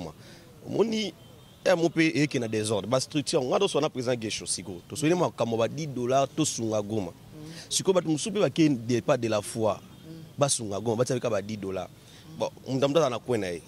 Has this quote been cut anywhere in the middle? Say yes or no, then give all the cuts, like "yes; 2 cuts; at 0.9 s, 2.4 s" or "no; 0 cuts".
no; 0 cuts